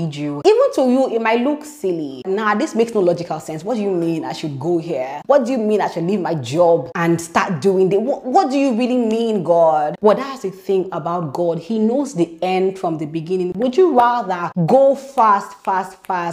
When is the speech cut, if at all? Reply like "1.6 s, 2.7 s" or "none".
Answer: none